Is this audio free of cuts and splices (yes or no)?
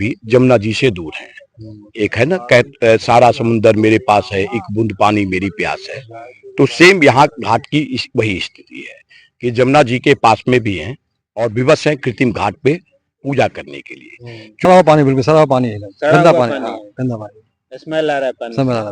no